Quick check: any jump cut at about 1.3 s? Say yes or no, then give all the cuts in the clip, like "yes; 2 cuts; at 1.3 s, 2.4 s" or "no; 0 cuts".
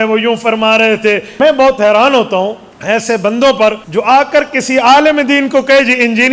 yes; 3 cuts; at 1.3 s, 2.7 s, 3.8 s